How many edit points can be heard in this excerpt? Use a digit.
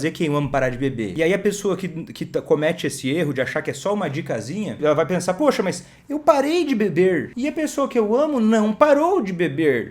3